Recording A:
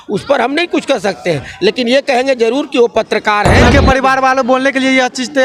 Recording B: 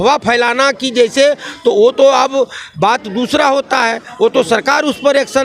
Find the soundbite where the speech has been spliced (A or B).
A